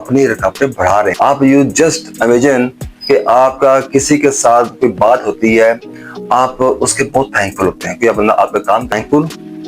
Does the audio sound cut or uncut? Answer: cut